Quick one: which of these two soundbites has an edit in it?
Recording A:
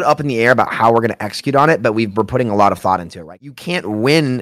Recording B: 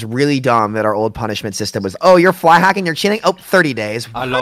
A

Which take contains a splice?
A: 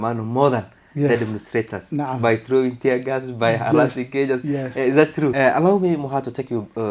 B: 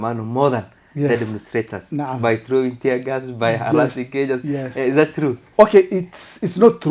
A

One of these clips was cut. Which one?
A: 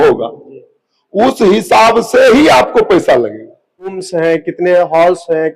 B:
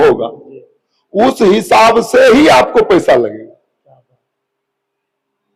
A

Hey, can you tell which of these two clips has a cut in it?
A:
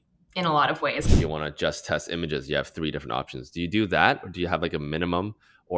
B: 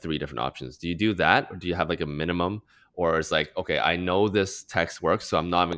A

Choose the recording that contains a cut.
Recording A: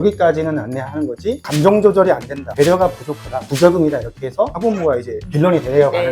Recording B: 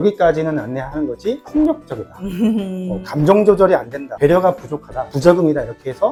A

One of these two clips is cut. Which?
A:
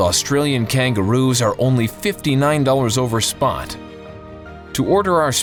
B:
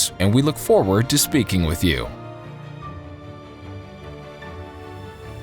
B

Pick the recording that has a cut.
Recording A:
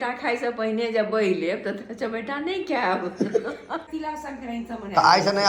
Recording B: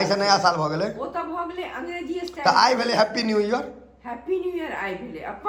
A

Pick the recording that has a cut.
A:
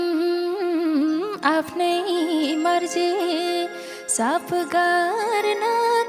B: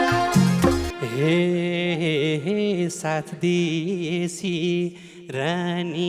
B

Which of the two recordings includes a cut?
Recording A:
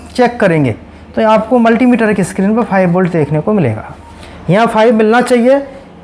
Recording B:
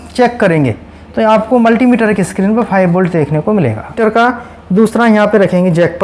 B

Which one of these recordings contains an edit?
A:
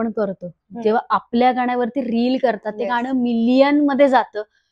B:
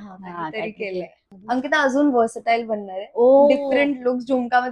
B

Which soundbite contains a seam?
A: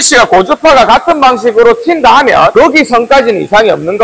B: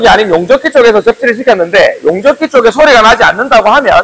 A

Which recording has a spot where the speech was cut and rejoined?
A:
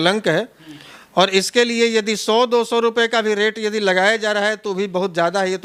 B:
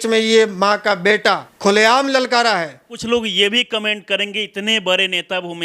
B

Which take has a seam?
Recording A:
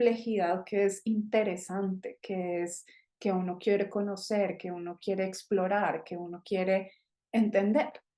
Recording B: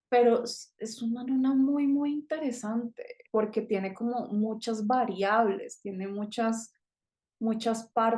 B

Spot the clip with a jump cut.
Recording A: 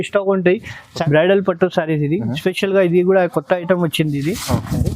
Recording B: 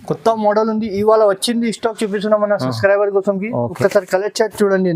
A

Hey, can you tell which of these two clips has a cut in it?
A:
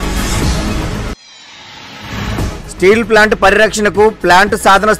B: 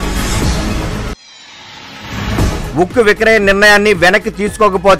B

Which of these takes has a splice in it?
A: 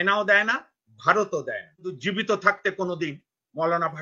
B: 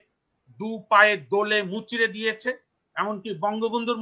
A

